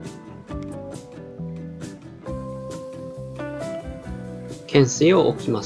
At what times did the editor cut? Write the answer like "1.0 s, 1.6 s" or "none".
4.7 s